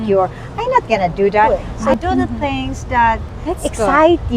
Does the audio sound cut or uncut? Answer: cut